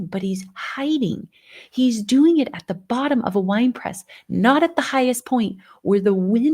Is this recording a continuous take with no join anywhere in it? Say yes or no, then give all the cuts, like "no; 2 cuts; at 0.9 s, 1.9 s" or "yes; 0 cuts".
yes; 0 cuts